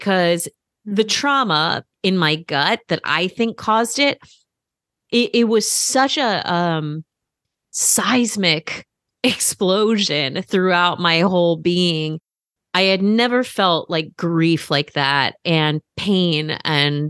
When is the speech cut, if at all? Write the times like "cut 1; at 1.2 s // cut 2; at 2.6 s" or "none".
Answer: cut 1; at 1.8 s